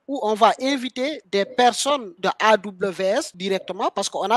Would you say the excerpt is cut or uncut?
uncut